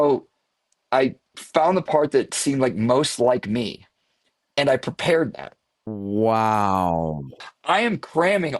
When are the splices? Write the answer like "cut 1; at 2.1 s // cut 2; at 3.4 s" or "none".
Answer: cut 1; at 7.4 s